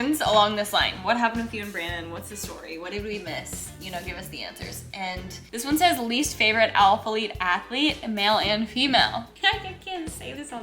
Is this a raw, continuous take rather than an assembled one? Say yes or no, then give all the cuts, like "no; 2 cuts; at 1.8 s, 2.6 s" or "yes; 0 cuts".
no; 2 cuts; at 5.4 s, 9.3 s